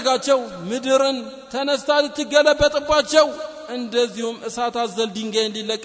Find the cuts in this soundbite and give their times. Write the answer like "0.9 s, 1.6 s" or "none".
none